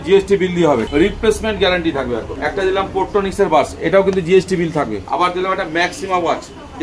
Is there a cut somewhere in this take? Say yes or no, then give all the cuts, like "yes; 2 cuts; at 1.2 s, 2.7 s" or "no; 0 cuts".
yes; 3 cuts; at 0.9 s, 2.3 s, 5.0 s